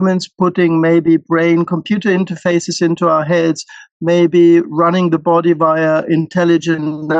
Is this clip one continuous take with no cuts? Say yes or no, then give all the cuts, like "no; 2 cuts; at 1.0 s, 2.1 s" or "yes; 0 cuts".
yes; 0 cuts